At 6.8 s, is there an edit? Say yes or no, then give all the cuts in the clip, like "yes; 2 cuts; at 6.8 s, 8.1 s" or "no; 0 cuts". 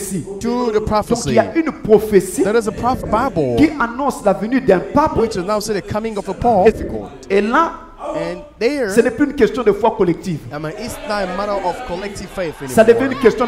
yes; 2 cuts; at 3.0 s, 6.8 s